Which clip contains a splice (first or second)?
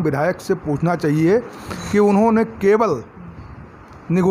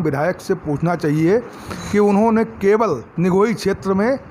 second